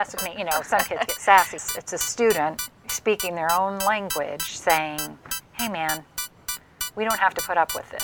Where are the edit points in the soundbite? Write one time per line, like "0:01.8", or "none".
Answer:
0:01.7